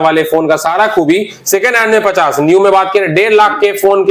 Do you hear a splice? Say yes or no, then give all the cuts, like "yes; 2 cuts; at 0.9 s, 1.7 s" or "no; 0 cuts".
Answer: no; 0 cuts